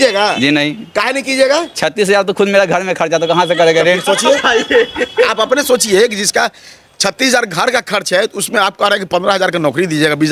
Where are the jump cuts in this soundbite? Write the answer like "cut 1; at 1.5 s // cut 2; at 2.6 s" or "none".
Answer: none